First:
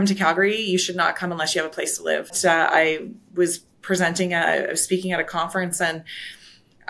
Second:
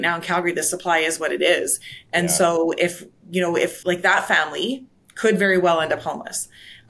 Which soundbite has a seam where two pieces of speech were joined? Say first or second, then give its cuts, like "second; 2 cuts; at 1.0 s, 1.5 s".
first; 1 cut; at 2.3 s